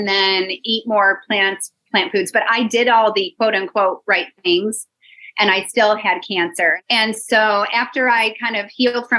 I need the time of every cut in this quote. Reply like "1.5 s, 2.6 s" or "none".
6.8 s